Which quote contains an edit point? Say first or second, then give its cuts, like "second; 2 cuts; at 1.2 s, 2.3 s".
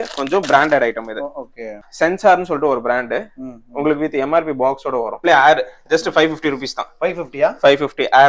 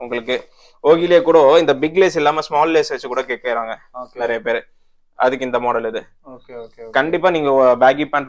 first; 2 cuts; at 1.9 s, 5.2 s